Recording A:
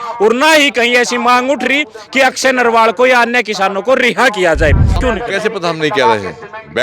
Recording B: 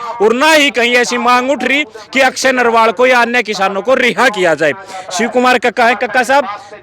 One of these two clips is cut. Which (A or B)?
A